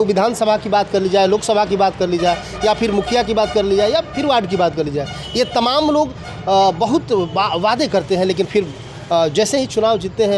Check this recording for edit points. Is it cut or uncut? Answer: uncut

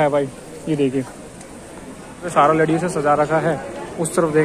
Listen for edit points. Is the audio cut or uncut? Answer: cut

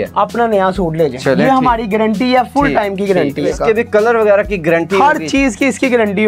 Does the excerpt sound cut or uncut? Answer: cut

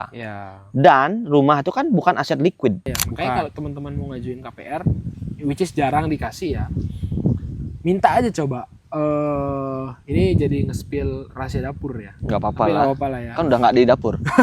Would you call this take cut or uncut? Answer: cut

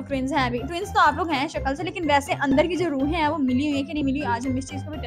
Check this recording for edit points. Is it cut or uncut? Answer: uncut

